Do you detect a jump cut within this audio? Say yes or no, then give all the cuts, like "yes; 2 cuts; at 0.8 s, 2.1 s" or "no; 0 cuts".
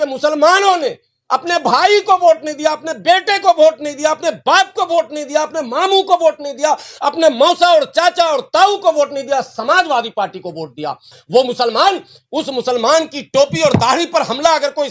yes; 1 cut; at 11.2 s